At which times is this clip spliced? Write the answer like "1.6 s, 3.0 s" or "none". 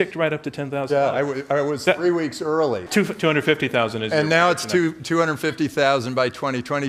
2.8 s